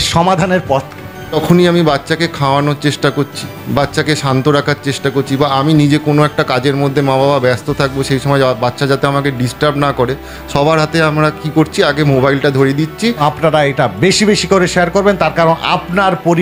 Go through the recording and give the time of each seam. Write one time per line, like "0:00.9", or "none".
0:01.3
0:13.2